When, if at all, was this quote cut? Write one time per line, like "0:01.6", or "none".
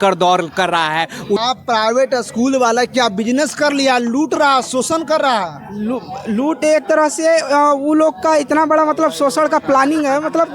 0:01.4